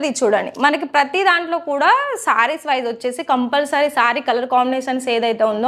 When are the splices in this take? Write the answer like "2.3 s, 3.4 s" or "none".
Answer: none